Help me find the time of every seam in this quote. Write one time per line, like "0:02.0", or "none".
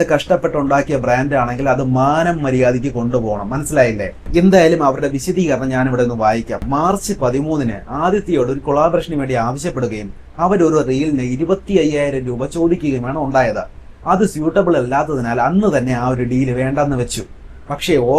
none